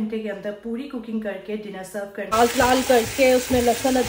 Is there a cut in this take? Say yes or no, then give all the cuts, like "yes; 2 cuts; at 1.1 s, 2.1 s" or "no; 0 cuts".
yes; 1 cut; at 2.3 s